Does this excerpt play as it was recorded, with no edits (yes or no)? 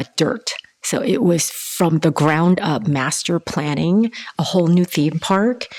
yes